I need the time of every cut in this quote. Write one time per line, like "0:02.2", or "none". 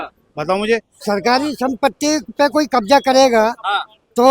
0:00.9